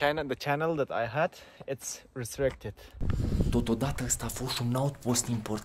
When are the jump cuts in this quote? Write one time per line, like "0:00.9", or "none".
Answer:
0:02.9